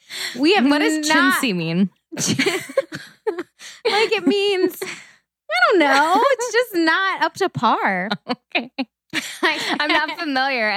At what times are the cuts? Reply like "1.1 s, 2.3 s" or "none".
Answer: none